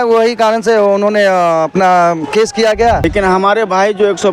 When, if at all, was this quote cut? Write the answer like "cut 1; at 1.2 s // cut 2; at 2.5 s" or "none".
cut 1; at 3.0 s

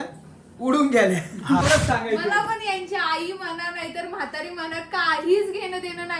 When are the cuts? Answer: cut 1; at 1.6 s

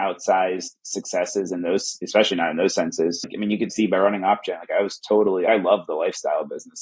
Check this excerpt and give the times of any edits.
cut 1; at 2.0 s // cut 2; at 3.2 s // cut 3; at 5.5 s

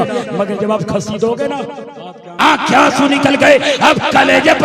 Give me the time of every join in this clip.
cut 1; at 2.4 s

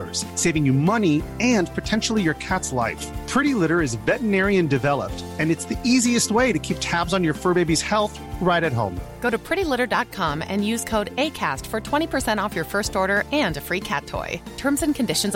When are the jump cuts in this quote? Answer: none

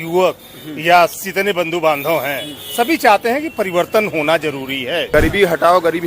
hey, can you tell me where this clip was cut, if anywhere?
cut 1; at 1.2 s // cut 2; at 5.1 s

